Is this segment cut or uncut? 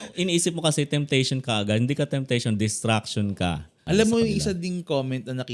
cut